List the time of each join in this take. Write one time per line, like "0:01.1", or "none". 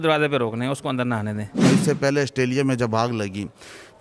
0:01.5